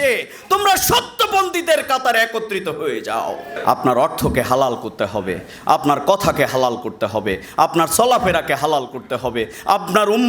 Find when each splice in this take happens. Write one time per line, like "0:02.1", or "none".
0:03.5